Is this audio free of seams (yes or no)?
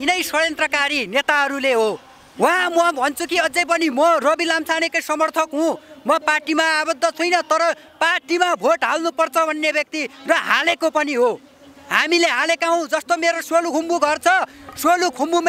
yes